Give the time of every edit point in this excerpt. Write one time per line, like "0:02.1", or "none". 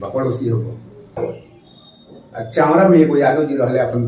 0:01.1